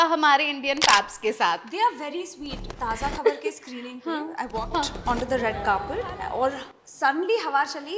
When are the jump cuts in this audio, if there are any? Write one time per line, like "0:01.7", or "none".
0:02.7